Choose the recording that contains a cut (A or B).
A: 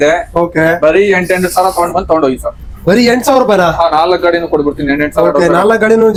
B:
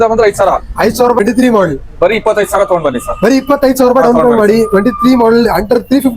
B